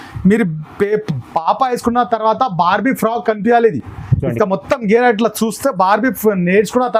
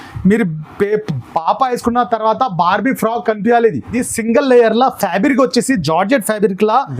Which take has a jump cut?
second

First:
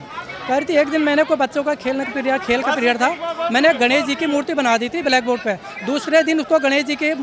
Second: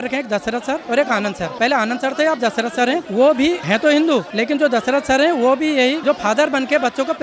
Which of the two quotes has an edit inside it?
second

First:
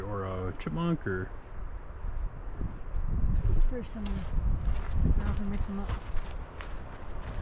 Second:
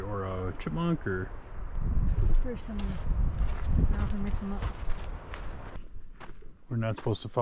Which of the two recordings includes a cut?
second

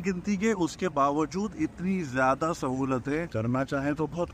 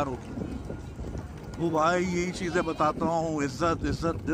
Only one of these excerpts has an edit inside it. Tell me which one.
first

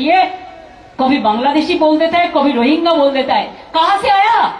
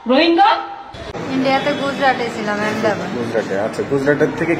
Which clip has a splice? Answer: second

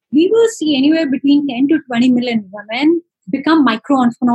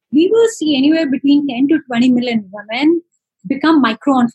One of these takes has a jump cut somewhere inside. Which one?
first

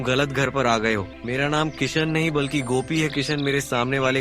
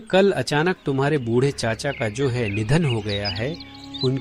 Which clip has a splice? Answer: first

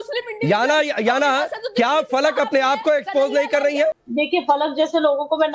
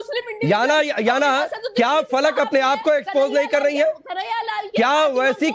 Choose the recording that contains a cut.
first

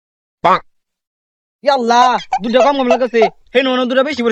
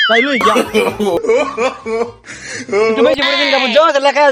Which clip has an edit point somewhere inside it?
second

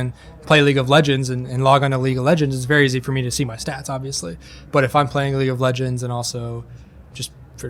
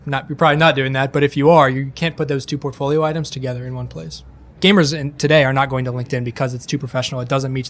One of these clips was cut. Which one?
second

